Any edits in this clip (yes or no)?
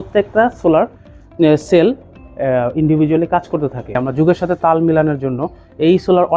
yes